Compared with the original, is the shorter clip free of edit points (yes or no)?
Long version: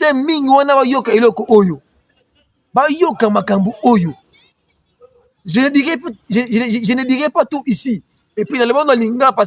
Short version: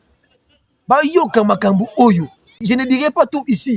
no